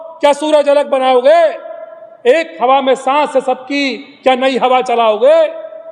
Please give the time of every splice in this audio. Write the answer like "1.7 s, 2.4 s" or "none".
none

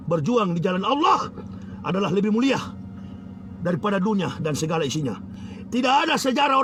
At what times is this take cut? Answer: none

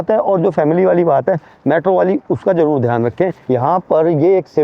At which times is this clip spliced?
3.4 s

